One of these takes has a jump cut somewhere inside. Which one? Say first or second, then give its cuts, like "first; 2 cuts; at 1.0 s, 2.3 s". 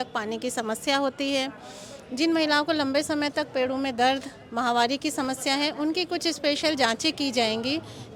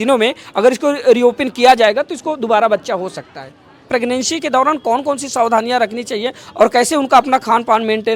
second; 1 cut; at 3.8 s